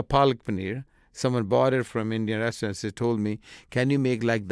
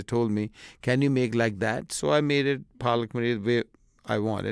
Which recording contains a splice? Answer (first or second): first